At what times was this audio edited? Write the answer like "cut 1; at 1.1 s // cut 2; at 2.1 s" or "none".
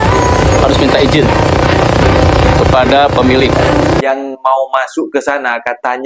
cut 1; at 4.0 s